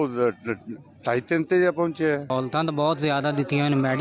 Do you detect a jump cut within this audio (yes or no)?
yes